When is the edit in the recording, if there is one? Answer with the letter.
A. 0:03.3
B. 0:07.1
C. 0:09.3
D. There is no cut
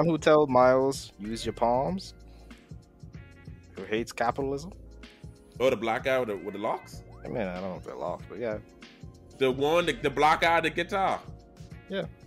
C